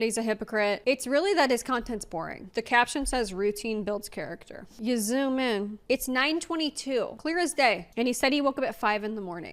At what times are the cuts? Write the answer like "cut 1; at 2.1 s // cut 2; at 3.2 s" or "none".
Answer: cut 1; at 2.5 s // cut 2; at 4.7 s // cut 3; at 5.8 s // cut 4; at 7.4 s